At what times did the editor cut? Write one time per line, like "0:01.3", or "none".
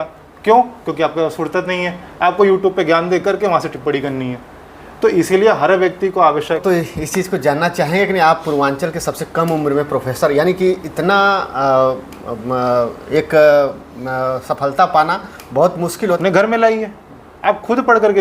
0:06.6
0:15.9